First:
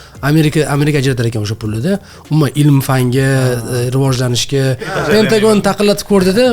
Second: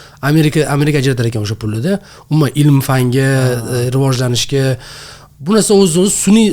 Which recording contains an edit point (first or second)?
first